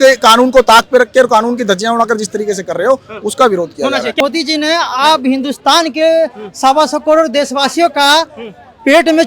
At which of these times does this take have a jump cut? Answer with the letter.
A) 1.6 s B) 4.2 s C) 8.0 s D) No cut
B